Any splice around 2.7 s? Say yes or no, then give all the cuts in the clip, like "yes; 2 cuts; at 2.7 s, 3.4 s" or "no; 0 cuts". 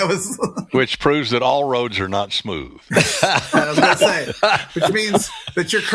yes; 1 cut; at 2.7 s